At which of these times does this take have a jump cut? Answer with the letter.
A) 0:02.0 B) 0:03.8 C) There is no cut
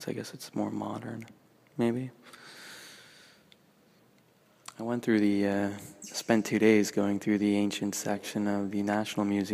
A